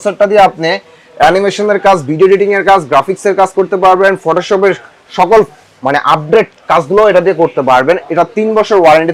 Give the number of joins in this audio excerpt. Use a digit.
0